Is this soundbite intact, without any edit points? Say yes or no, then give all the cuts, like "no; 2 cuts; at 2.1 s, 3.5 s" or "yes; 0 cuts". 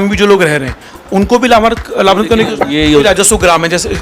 no; 1 cut; at 3.0 s